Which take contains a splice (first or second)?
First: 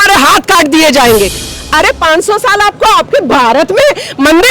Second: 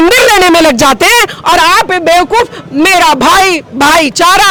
first